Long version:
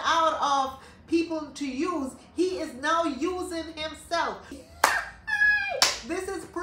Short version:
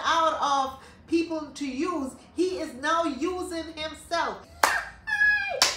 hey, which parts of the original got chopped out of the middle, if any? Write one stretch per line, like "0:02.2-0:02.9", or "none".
0:04.5-0:04.7